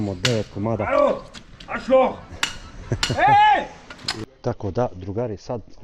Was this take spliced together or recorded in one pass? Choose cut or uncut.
cut